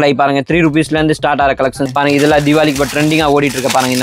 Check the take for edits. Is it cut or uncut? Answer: cut